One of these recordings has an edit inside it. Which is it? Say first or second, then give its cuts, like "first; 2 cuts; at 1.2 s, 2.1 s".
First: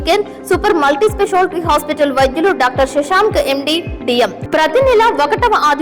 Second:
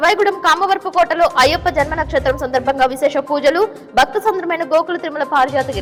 first; 1 cut; at 4.4 s